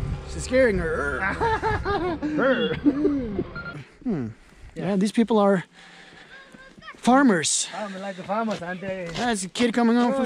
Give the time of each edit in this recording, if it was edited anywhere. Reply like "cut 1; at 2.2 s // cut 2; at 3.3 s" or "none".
cut 1; at 3.9 s